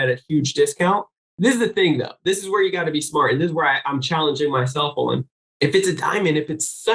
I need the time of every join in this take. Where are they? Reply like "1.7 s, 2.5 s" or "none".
1.2 s, 5.4 s